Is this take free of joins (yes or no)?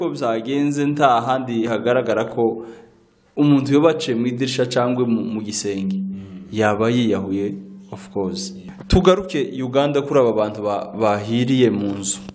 no